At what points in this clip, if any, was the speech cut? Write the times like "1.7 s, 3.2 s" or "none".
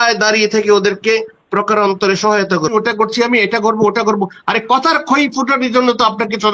2.7 s